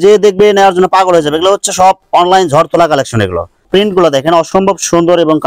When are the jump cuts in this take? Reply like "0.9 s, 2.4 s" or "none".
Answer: 3.5 s

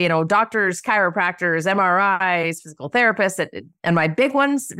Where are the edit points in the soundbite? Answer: 3.7 s

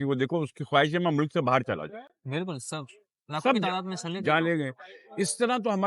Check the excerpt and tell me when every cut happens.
none

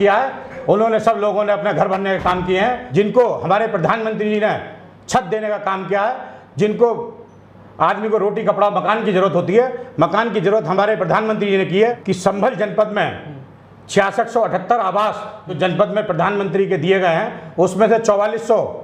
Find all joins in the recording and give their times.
2.8 s, 12.1 s, 15.6 s

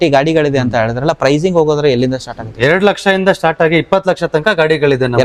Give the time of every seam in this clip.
none

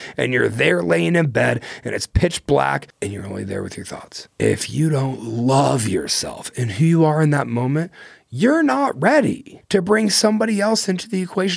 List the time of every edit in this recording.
2.9 s, 4.2 s, 9.5 s

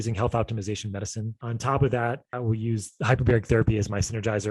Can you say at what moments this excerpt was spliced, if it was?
1.4 s, 2.3 s

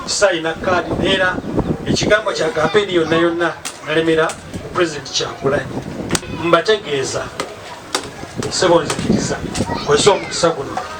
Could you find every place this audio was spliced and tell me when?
6.3 s

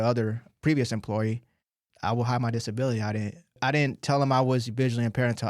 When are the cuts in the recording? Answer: 1.8 s, 3.6 s

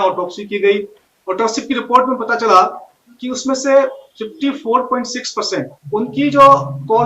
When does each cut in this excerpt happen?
5.8 s

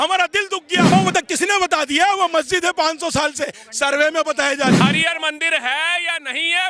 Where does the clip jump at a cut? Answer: 0.9 s, 4.7 s

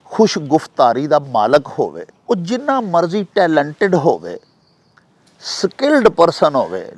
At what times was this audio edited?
2.1 s

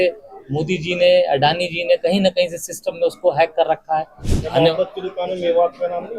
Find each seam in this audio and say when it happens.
4.2 s

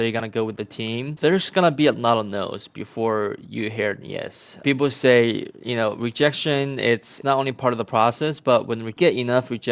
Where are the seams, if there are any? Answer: 1.1 s, 4.6 s, 7.1 s, 8.9 s

